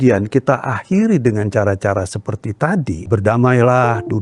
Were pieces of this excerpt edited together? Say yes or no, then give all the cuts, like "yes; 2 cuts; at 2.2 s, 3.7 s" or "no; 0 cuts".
yes; 1 cut; at 3.1 s